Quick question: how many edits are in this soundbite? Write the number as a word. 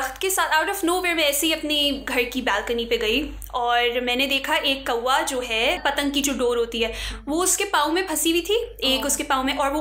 zero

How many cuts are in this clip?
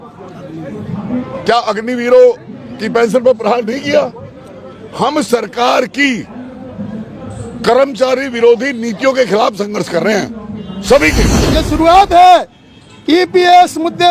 one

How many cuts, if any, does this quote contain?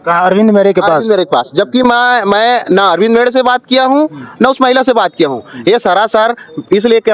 zero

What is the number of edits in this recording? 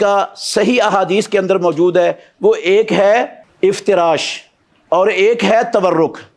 one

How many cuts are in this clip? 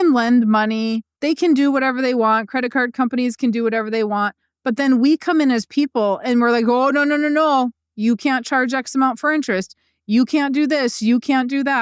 one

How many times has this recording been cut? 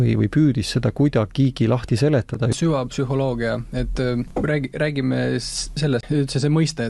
three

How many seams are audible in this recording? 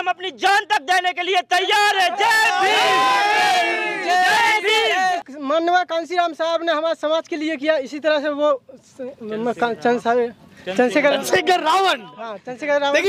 one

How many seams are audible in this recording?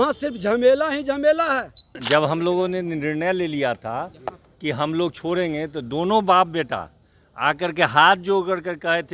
one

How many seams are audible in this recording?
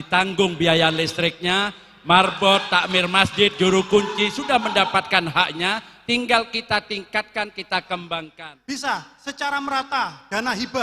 one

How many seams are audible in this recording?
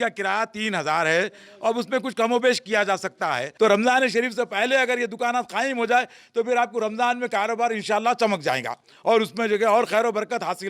one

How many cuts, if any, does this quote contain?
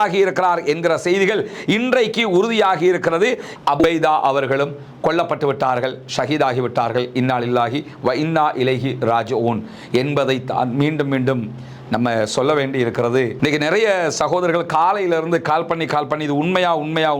two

